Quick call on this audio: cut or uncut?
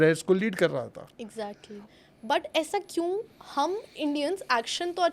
cut